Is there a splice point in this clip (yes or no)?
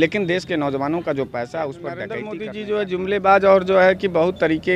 yes